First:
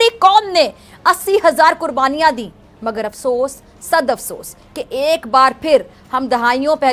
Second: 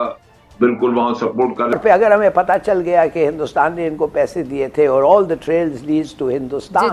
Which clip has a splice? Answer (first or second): second